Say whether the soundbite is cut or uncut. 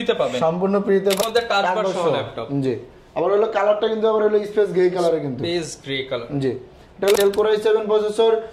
cut